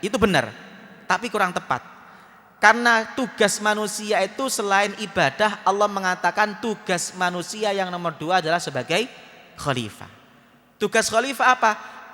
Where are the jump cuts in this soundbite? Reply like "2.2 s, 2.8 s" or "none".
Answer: none